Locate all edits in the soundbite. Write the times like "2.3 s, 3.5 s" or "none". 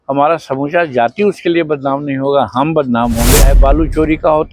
3.5 s